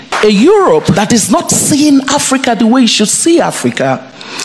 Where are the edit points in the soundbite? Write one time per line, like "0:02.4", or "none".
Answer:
0:01.0